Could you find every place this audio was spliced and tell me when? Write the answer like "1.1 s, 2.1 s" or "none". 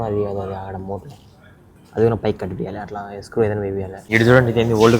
4.0 s